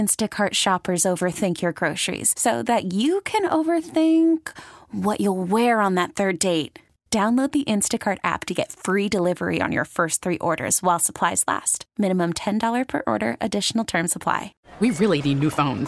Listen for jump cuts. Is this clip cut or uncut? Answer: cut